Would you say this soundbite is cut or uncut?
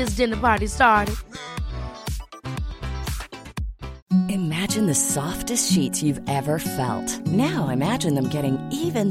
cut